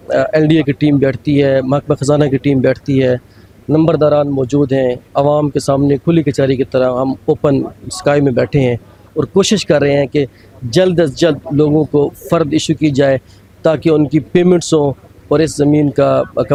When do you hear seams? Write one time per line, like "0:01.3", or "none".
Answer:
none